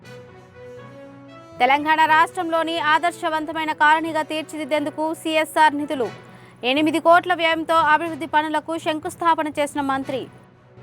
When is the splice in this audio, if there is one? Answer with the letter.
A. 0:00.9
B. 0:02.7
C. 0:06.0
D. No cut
A